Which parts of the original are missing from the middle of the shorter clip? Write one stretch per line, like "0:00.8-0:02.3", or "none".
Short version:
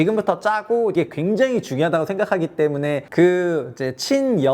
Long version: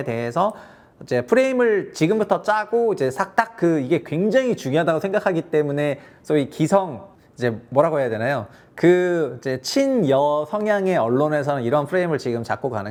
0:03.0-0:03.9
0:06.0-0:08.7